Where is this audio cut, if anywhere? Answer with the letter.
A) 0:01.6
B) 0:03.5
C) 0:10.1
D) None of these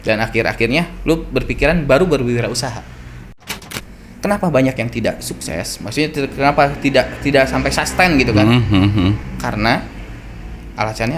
B